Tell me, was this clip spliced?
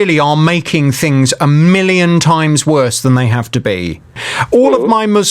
yes; 1 cut; at 4.2 s

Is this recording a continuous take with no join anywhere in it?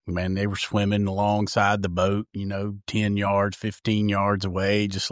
yes; 0 cuts

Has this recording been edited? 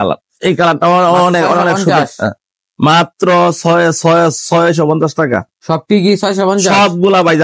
no; 0 cuts

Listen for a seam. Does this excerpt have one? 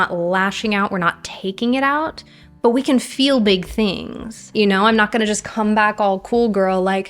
yes; 1 cut; at 4.4 s

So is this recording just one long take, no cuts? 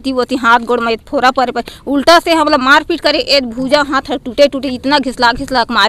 yes; 0 cuts

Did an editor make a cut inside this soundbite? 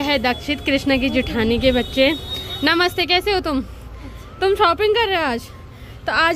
no; 0 cuts

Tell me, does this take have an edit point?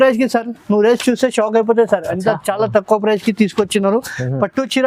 no; 0 cuts

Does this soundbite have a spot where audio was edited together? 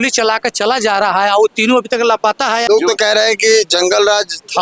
yes; 1 cut; at 2.6 s

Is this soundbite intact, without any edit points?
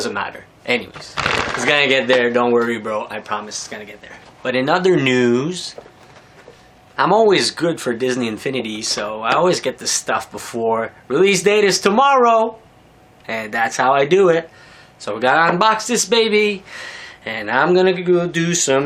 yes; 0 cuts

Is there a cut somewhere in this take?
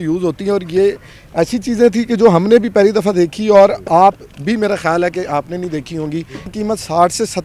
yes; 1 cut; at 6.5 s

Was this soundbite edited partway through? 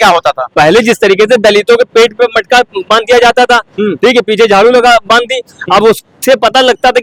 no; 0 cuts

